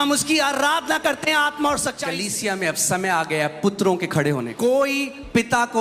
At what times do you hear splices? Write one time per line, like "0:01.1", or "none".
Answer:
0:02.1
0:04.5